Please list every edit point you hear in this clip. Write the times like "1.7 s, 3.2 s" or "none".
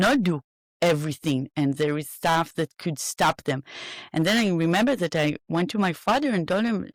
none

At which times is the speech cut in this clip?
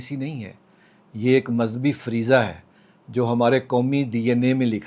none

